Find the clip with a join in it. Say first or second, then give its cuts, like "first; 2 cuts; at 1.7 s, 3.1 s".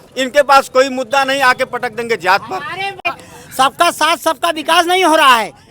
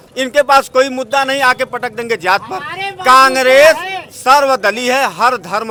first; 1 cut; at 3.1 s